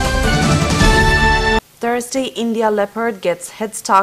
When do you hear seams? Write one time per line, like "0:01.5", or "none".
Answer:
none